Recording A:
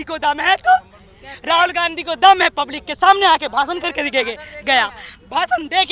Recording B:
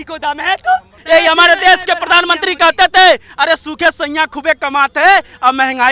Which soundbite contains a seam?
B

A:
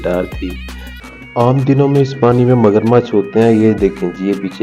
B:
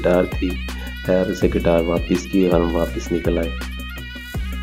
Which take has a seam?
A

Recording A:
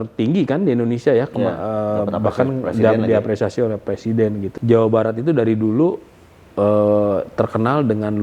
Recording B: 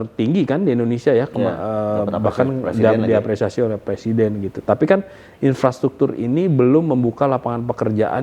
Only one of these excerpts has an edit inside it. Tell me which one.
A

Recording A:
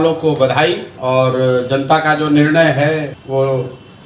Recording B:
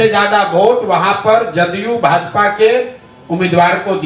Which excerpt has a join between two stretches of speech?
A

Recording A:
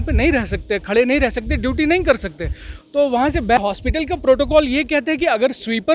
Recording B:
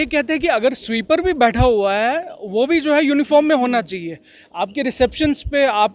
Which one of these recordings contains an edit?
A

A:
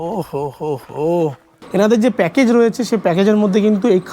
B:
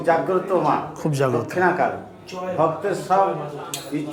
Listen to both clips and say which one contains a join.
A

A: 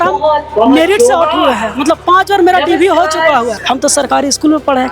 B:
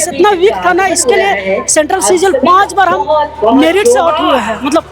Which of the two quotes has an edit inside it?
A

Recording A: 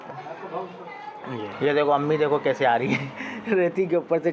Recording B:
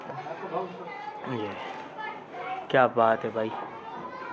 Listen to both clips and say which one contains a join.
A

